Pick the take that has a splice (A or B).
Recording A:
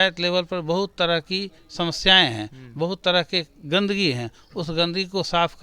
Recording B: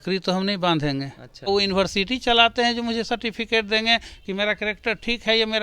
B